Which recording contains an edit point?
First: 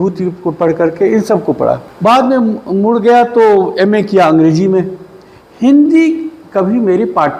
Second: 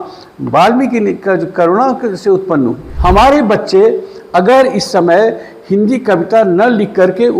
second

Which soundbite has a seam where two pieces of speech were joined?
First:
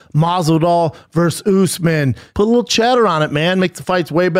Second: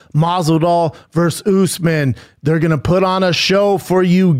first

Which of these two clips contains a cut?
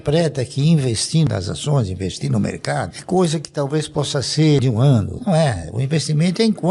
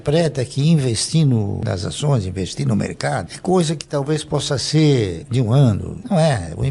first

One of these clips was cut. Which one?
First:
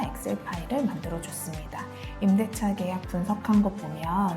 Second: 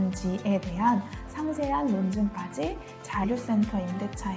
second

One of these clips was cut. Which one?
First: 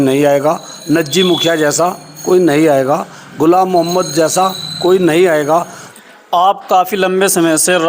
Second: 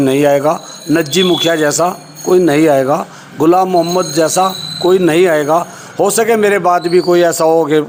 first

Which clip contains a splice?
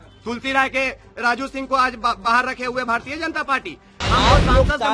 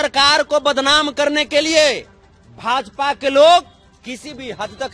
first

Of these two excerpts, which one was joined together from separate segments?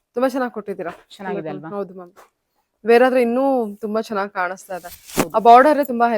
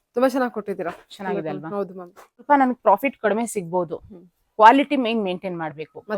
second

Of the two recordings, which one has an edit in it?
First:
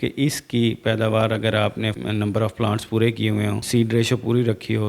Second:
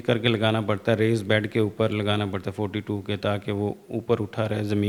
first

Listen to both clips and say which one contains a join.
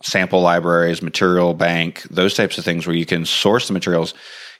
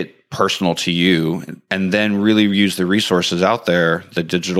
second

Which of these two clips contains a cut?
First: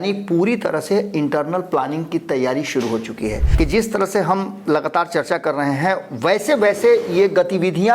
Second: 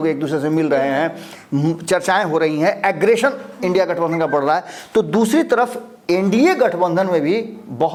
first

